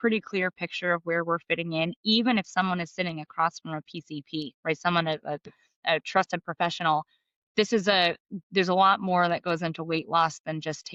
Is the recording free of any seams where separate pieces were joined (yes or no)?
yes